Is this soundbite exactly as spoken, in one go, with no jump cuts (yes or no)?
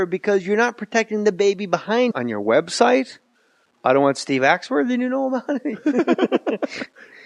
yes